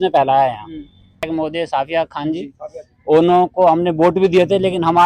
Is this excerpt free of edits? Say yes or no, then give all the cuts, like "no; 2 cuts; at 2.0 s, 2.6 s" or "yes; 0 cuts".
no; 1 cut; at 1.3 s